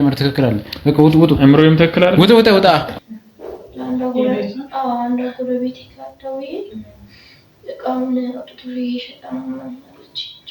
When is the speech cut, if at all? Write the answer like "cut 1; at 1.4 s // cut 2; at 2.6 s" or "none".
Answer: cut 1; at 3.0 s